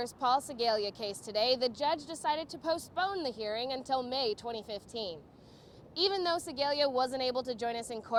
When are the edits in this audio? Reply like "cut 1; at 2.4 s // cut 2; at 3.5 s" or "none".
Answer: none